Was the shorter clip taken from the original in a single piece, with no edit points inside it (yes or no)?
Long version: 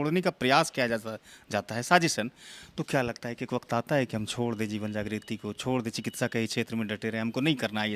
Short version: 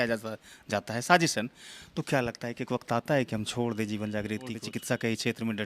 no